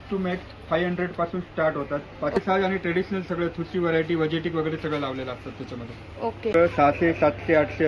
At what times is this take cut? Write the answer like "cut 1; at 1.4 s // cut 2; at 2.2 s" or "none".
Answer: cut 1; at 2.4 s // cut 2; at 6.5 s